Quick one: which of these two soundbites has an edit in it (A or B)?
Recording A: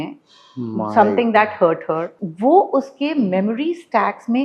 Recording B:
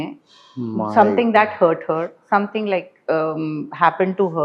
A